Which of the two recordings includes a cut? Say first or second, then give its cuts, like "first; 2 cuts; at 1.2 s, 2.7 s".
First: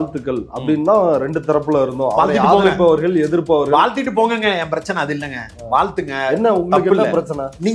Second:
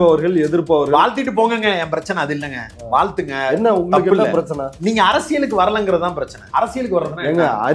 second; 1 cut; at 6.3 s